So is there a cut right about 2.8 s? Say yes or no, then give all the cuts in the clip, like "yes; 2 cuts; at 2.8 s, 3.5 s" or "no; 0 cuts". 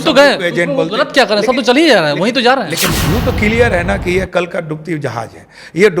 yes; 1 cut; at 2.8 s